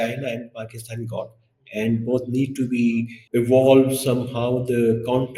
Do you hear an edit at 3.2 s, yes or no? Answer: yes